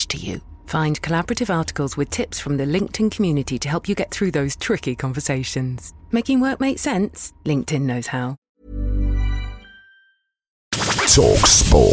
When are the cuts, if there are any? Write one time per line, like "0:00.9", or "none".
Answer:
0:08.4
0:10.7